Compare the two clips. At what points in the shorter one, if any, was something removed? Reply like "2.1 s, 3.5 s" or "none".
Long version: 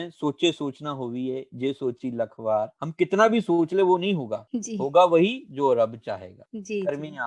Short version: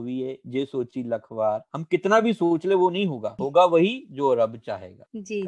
3.3 s